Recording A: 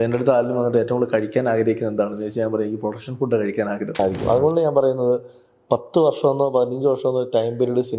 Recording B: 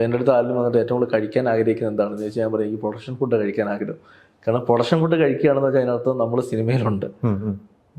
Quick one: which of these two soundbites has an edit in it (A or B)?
A